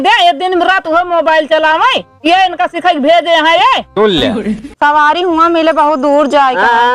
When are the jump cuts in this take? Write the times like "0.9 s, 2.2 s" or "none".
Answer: 4.6 s